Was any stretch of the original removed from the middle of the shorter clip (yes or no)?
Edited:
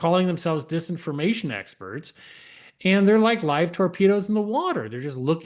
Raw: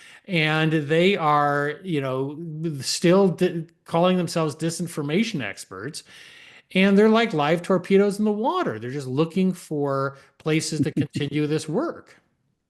no